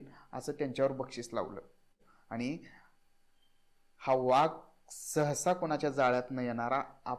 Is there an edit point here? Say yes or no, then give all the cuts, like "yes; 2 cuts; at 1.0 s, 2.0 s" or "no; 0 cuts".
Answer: yes; 1 cut; at 2.1 s